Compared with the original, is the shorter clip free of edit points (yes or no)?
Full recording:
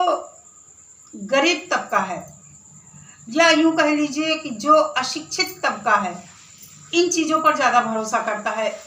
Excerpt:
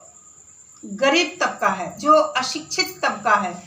no